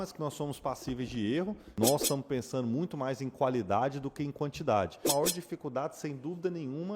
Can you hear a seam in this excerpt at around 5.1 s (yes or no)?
yes